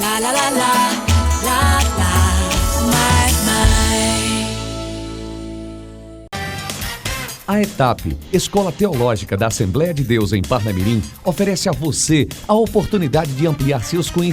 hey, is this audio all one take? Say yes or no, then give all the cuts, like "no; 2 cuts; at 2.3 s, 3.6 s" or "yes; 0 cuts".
no; 1 cut; at 6.3 s